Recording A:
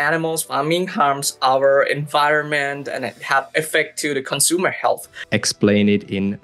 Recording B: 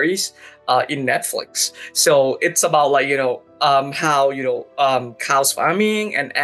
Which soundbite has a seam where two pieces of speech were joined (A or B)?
A